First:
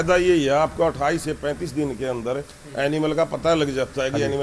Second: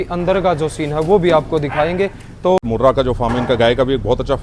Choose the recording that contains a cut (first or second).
second